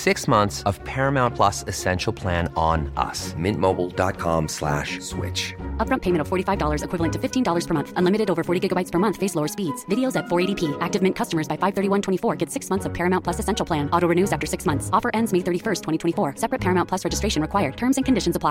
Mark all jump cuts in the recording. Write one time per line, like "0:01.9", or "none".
none